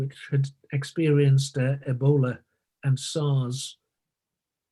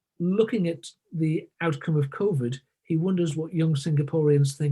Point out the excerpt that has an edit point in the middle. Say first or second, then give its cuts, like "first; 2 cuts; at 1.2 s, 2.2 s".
second; 1 cut; at 1.5 s